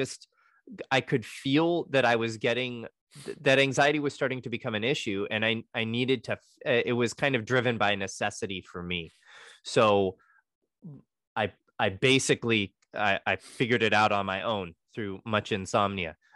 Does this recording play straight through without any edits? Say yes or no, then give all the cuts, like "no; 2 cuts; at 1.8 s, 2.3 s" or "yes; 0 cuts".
no; 2 cuts; at 2.9 s, 10.3 s